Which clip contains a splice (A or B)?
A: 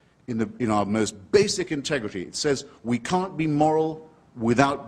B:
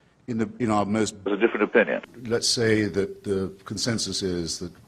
A